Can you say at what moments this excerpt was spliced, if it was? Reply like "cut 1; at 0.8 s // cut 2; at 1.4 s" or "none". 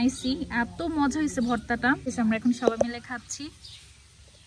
cut 1; at 2.1 s